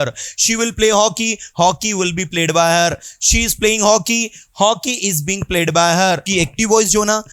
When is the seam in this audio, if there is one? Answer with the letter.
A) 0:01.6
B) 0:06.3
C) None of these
B